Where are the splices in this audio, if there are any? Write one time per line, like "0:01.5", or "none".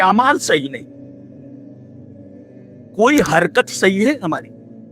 0:01.4
0:02.9